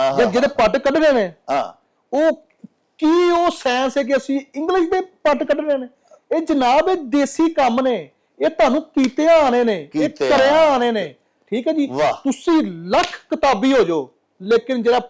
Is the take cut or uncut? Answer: uncut